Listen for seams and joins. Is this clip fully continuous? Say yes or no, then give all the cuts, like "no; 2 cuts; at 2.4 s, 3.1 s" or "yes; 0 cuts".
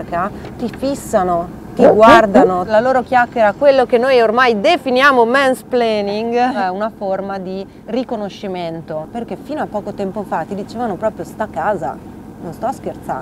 no; 3 cuts; at 2.7 s, 6.6 s, 9.1 s